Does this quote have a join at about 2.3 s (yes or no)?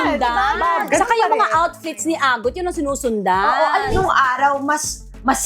no